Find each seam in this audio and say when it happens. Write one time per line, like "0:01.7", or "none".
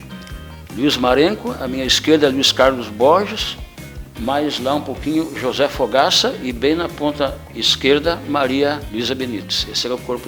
0:08.8